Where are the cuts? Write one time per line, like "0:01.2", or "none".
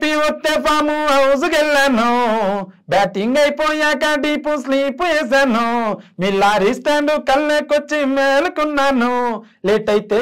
none